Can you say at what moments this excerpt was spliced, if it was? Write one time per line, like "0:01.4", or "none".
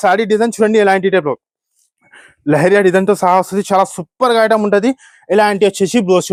none

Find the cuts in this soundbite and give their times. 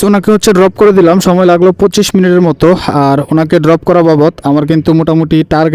none

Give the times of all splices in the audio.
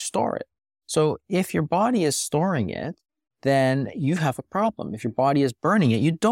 none

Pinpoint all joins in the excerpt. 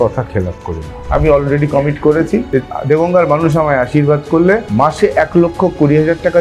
0:00.9
0:02.5
0:04.7

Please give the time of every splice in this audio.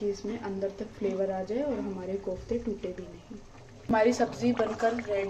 0:03.9

